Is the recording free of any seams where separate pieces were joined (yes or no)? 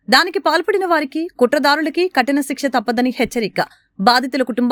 yes